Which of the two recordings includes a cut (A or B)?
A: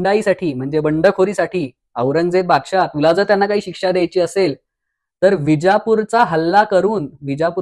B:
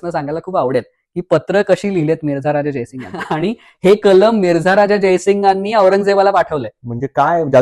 B